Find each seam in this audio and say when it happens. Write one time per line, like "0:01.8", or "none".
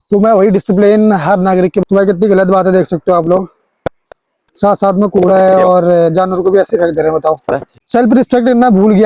0:01.3
0:07.7